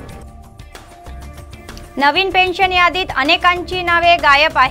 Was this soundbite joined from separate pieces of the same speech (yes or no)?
yes